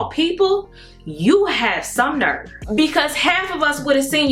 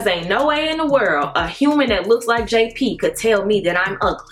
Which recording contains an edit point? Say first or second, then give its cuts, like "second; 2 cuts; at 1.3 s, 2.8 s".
first; 1 cut; at 2.5 s